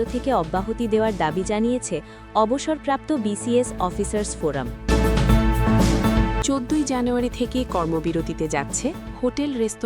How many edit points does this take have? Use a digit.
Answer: 2